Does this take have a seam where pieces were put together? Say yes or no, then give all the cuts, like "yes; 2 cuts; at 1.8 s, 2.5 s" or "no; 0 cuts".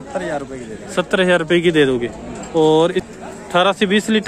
yes; 1 cut; at 3.1 s